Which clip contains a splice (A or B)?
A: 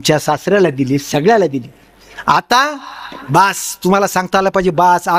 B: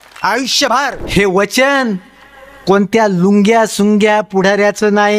B